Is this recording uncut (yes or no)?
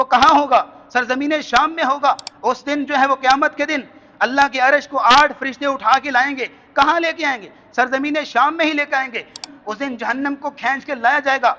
no